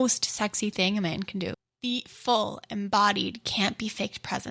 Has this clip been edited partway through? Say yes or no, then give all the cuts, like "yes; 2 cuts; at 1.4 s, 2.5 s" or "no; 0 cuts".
yes; 1 cut; at 1.7 s